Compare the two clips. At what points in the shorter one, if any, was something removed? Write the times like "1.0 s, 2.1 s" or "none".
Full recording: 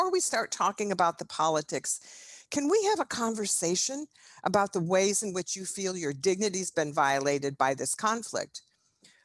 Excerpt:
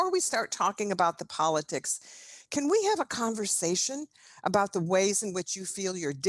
none